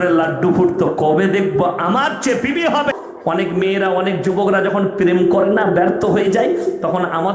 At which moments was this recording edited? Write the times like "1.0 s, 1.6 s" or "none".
3.1 s